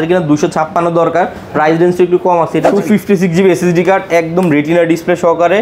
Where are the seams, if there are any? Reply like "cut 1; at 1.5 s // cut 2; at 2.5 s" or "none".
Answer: cut 1; at 2.7 s

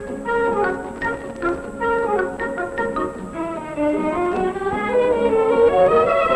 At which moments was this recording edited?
cut 1; at 1.8 s

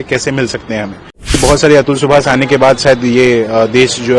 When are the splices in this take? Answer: cut 1; at 1.4 s

